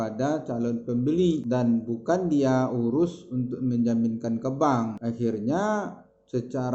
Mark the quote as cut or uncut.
cut